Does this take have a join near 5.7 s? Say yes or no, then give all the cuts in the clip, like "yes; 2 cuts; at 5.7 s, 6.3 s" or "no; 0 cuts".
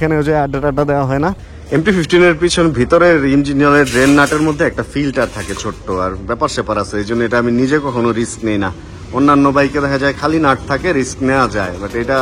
no; 1 cut; at 1.4 s